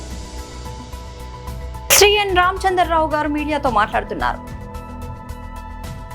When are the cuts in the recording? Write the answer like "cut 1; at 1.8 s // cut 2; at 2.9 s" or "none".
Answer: cut 1; at 1.6 s